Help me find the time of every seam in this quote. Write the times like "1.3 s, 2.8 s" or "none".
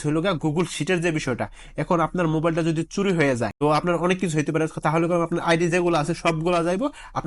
3.5 s